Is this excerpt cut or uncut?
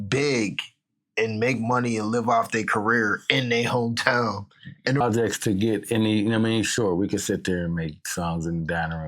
cut